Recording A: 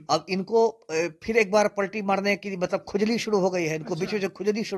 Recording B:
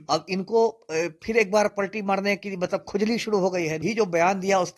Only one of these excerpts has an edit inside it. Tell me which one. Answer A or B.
B